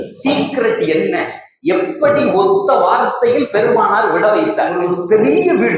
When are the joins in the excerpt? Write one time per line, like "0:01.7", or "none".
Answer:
0:04.8